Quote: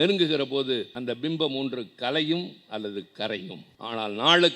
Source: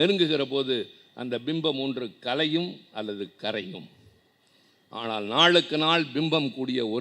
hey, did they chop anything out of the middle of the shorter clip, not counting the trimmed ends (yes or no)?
yes